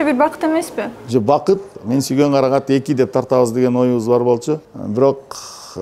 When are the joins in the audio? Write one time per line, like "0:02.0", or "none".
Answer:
0:01.7
0:04.7